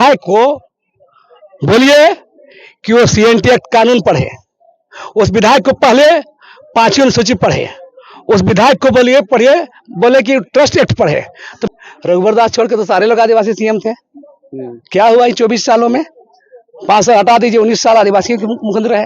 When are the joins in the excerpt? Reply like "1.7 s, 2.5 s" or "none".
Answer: 11.6 s